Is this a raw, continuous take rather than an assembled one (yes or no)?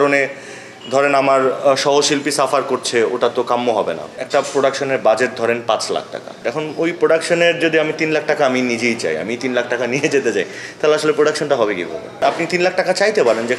no